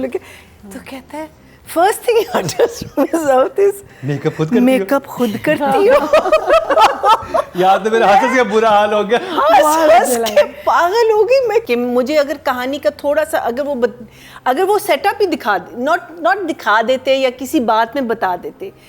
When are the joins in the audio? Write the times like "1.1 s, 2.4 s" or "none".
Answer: 11.6 s